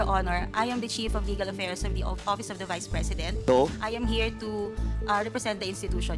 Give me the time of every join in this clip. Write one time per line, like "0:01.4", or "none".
none